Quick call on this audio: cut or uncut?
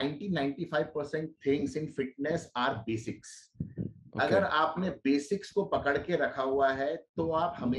uncut